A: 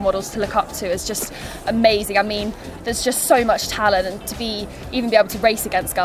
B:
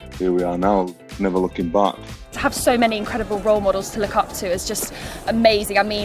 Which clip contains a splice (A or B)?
B